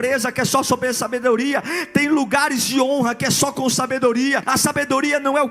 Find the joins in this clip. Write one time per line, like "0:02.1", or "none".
0:04.4